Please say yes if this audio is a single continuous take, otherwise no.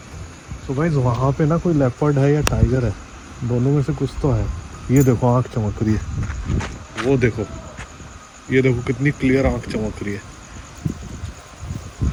yes